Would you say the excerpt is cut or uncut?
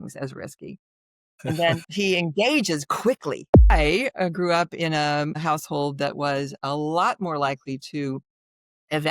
cut